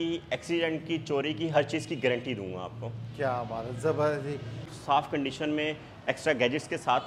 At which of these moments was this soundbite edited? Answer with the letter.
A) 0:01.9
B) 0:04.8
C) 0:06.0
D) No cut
B